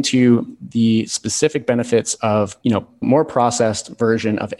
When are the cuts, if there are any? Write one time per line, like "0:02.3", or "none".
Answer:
0:03.0